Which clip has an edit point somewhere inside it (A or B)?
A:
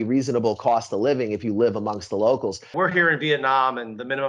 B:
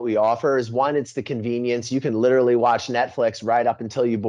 A